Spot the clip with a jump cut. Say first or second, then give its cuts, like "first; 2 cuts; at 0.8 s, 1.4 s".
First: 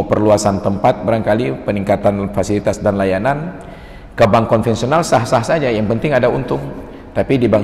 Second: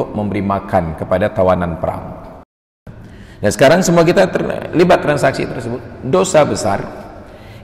second; 1 cut; at 2.9 s